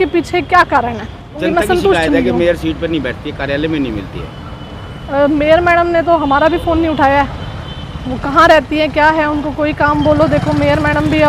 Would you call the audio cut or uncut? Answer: cut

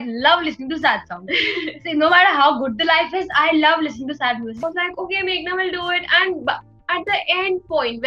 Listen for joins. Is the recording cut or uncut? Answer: cut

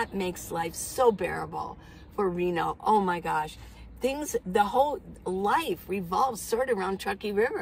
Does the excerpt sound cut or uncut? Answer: uncut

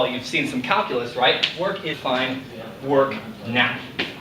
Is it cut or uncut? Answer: uncut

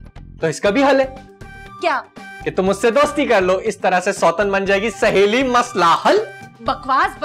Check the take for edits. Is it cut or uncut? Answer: uncut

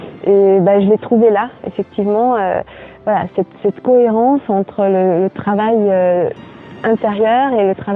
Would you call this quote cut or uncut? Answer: uncut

